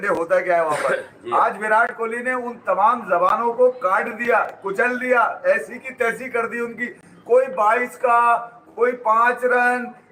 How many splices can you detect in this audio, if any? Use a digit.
0